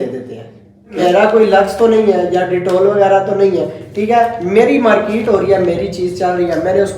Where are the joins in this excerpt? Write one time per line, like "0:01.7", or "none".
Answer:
0:01.0